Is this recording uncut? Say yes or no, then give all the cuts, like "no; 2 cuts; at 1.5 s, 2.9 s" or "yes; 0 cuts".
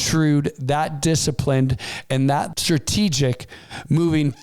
no; 1 cut; at 2.6 s